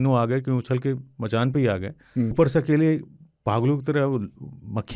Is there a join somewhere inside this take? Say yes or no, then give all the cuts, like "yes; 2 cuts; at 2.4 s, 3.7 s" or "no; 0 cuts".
yes; 1 cut; at 2.3 s